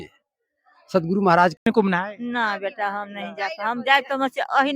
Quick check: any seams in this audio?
yes; 1 cut; at 1.6 s

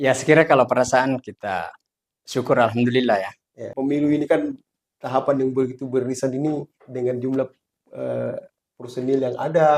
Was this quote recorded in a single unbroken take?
no; 1 cut; at 3.7 s

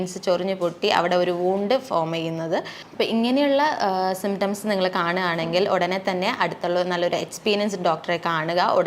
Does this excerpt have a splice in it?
yes; 1 cut; at 2.8 s

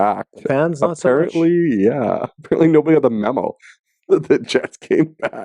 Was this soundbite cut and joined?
no; 0 cuts

